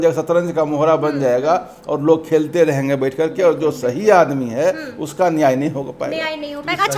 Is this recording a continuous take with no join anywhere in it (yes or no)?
yes